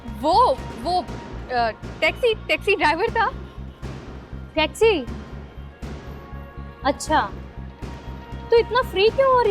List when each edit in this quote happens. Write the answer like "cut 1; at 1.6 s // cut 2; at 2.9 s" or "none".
none